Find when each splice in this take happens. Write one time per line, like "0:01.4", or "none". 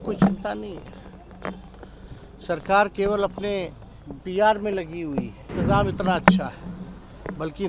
0:05.5